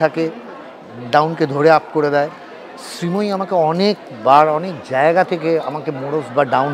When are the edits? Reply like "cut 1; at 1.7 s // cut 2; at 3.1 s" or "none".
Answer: none